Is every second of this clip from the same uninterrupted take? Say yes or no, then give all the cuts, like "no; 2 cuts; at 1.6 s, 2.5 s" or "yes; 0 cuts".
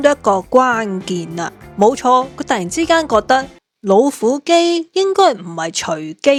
yes; 0 cuts